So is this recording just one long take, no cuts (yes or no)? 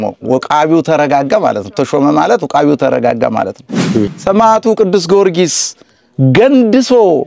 no